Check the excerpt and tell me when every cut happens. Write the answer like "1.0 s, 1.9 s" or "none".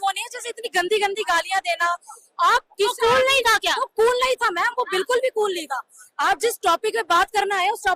none